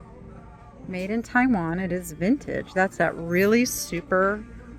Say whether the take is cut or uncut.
uncut